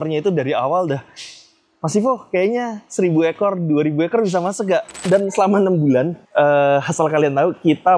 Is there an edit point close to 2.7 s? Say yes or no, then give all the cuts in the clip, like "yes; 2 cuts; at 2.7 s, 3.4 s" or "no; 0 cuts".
no; 1 cut; at 5.1 s